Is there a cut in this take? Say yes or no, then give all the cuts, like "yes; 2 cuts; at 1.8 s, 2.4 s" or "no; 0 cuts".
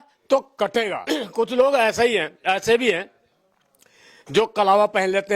yes; 1 cut; at 1.0 s